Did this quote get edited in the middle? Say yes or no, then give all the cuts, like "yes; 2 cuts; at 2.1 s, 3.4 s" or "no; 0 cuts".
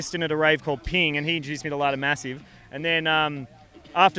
no; 0 cuts